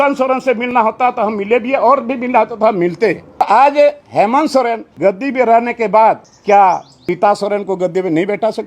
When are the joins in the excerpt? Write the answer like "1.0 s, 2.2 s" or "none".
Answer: 3.4 s, 4.9 s, 6.3 s, 7.0 s